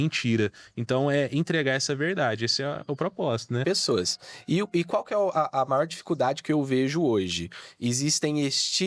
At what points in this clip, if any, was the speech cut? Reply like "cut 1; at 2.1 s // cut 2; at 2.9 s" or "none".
cut 1; at 3.6 s